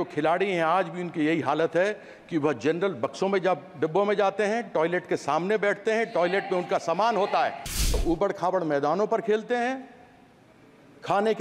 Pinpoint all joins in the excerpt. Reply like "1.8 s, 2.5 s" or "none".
8.0 s